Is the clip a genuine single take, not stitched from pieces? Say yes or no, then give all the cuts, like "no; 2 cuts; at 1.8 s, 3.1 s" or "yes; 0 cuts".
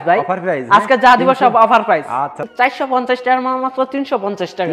no; 1 cut; at 2.5 s